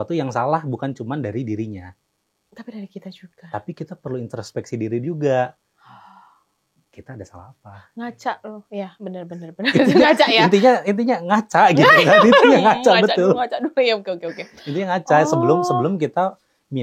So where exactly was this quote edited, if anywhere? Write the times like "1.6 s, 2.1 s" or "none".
none